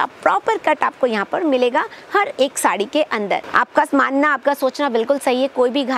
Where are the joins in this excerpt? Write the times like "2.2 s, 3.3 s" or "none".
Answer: 3.5 s